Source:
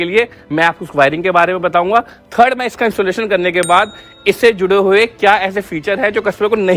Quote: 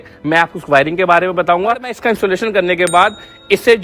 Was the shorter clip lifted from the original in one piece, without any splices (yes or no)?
no